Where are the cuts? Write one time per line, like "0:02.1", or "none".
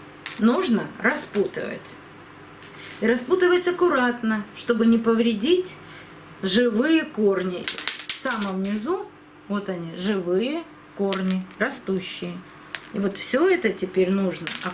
0:07.6